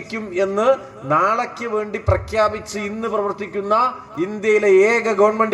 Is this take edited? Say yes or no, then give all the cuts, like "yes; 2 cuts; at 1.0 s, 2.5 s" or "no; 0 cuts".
no; 0 cuts